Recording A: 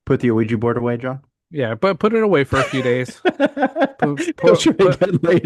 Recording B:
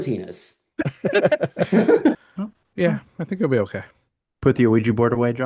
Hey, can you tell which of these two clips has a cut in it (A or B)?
B